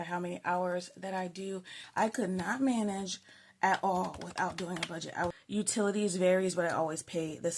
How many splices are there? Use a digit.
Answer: 2